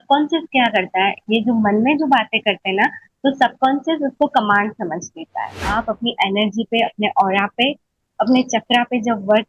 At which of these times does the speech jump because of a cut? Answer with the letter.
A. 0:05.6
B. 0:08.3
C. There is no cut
A